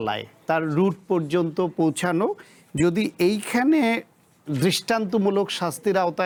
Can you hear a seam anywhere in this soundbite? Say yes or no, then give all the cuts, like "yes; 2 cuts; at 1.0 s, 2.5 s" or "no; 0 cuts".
no; 0 cuts